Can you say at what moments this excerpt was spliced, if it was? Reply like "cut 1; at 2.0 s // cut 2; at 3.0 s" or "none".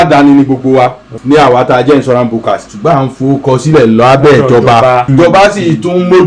cut 1; at 1.1 s // cut 2; at 2.7 s // cut 3; at 5.1 s